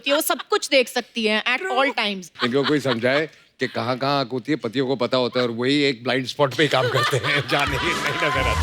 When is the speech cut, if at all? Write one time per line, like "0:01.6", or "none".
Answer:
0:02.3